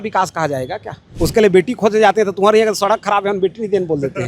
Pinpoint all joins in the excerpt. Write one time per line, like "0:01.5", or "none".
0:01.1